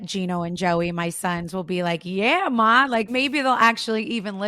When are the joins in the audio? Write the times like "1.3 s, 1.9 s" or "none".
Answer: 3.1 s